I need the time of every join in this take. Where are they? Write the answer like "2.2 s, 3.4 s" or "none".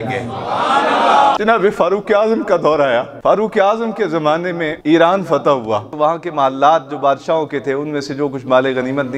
1.4 s, 3.1 s, 4.7 s, 5.9 s